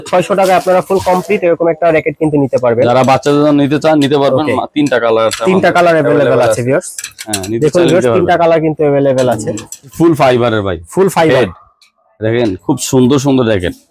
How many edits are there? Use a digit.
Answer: 1